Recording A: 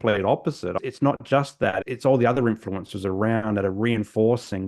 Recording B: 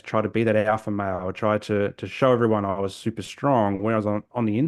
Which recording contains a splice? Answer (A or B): A